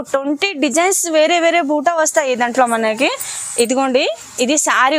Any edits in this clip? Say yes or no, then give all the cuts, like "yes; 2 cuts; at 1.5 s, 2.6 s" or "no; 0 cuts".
no; 0 cuts